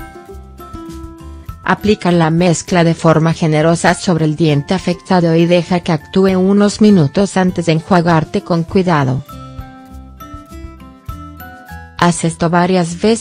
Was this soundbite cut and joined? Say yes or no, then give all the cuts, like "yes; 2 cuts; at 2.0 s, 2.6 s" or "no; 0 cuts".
yes; 1 cut; at 1.6 s